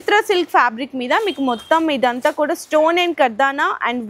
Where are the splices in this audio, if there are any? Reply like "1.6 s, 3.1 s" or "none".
none